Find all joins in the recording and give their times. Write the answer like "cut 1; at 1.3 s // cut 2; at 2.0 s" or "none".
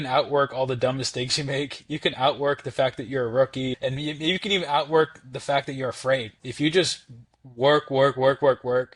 none